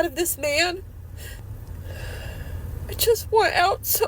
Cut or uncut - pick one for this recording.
cut